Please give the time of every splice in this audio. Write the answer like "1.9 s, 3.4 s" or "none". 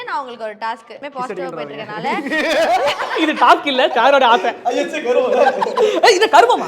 1.0 s